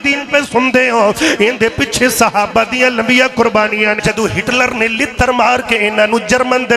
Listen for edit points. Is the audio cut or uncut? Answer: cut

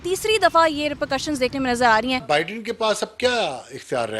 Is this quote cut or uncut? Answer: uncut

